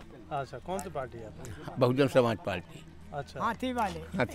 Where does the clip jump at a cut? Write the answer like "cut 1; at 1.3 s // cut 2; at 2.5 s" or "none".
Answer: none